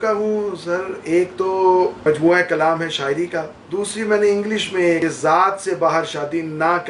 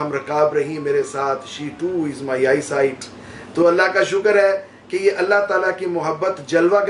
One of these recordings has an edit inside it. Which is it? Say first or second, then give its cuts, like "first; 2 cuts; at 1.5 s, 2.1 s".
first; 3 cuts; at 2.0 s, 3.6 s, 5.0 s